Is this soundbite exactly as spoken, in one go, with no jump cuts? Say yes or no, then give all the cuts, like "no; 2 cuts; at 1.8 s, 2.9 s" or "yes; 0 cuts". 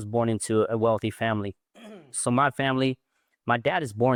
yes; 0 cuts